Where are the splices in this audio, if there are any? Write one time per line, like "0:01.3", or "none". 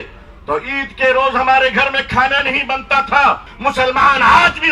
0:03.5